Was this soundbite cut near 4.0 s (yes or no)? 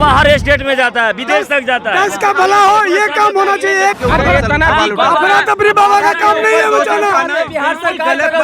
yes